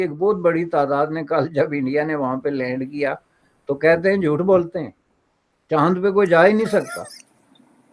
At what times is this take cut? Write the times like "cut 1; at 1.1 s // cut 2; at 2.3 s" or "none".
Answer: none